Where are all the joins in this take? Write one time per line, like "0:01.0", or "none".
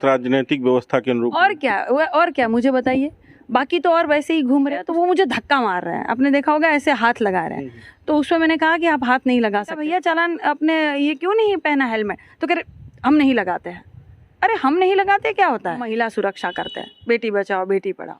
0:04.8
0:09.8
0:15.9